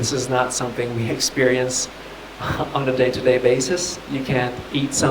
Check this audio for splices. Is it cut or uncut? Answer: cut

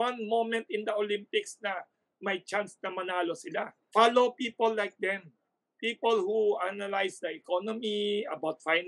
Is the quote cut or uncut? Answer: cut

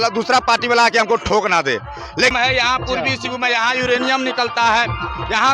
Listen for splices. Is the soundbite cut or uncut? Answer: cut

